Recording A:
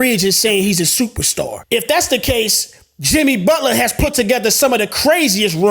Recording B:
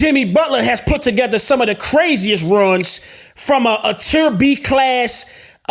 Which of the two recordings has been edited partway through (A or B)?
A